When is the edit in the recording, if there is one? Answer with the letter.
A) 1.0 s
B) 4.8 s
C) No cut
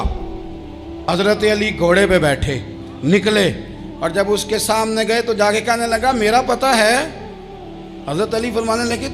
A